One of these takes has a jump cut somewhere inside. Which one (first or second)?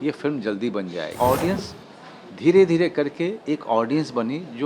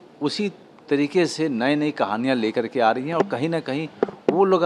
first